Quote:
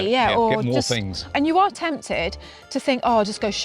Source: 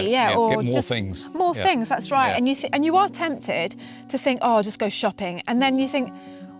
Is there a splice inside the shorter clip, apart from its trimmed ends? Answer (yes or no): yes